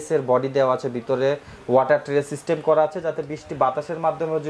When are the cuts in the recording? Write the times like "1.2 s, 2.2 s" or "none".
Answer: none